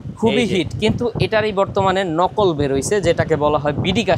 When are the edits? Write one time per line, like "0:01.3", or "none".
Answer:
none

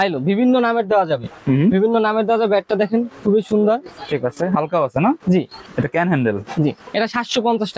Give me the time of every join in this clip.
0:05.6
0:06.8

